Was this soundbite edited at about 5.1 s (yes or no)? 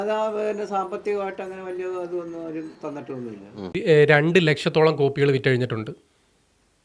no